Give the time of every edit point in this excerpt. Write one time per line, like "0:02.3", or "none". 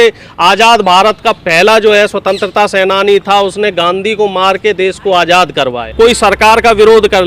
0:05.9